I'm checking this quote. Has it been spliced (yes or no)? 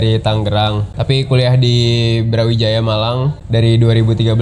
yes